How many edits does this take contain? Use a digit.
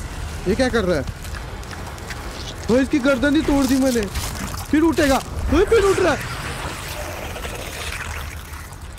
0